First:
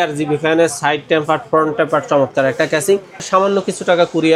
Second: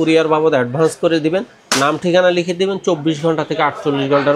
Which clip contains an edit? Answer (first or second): first